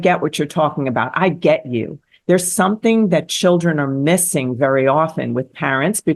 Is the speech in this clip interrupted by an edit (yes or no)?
no